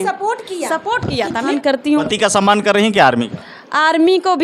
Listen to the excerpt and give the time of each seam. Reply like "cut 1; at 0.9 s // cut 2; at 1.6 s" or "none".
cut 1; at 1.5 s